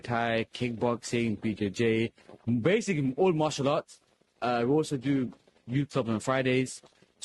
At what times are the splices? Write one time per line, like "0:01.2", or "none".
none